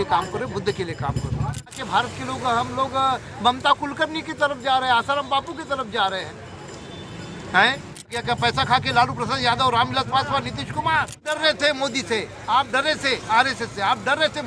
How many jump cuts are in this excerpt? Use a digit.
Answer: 3